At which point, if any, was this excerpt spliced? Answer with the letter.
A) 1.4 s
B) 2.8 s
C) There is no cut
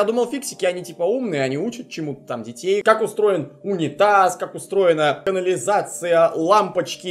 B